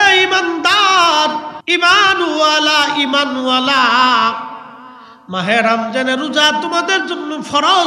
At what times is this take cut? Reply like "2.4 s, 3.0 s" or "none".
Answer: 1.5 s